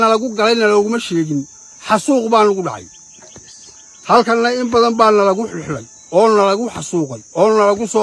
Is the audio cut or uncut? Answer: uncut